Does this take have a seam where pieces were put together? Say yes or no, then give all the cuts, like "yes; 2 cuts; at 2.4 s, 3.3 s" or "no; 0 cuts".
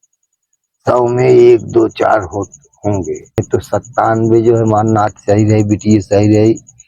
yes; 1 cut; at 3.3 s